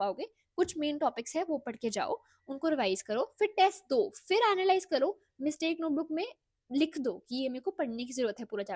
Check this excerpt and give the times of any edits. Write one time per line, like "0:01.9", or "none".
none